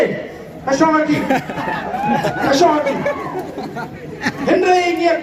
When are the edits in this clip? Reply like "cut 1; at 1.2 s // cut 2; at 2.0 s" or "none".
none